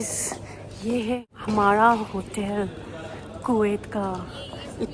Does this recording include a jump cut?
no; 0 cuts

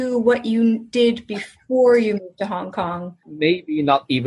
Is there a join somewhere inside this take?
yes; 1 cut; at 3.3 s

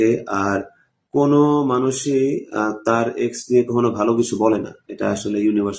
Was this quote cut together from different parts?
no; 0 cuts

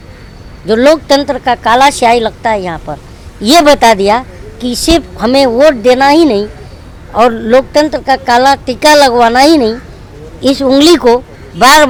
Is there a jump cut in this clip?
no; 0 cuts

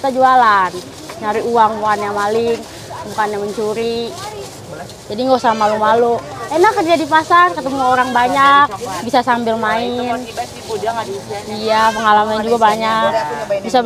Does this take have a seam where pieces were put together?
no; 0 cuts

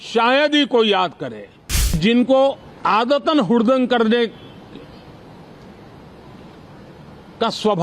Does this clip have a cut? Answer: yes; 1 cut; at 2.0 s

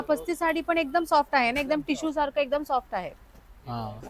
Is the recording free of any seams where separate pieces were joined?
yes; 0 cuts

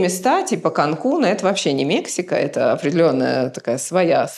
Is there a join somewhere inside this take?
no; 0 cuts

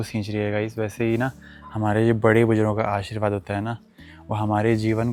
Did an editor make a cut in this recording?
no; 0 cuts

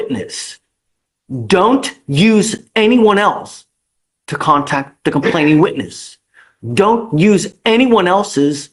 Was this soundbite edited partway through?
no; 0 cuts

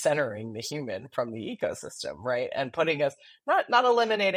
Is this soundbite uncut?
yes; 0 cuts

